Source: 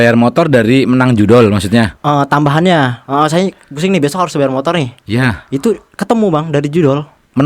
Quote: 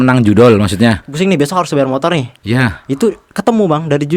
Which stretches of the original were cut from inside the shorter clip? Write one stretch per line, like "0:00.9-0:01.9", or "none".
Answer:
0:02.0-0:03.7